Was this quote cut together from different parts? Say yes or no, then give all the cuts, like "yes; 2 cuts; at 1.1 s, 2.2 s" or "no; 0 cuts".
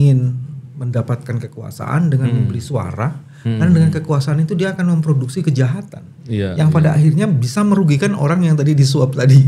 no; 0 cuts